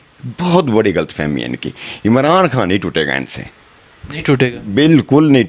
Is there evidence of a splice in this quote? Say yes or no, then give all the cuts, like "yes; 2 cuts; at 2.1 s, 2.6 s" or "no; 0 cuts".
no; 0 cuts